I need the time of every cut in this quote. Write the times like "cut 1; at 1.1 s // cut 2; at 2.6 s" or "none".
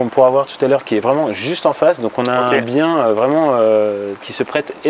none